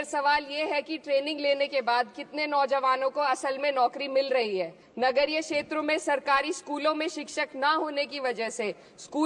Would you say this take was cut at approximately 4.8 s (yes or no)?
yes